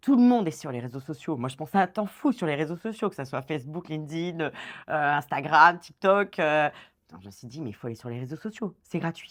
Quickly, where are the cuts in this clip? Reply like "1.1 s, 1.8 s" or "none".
none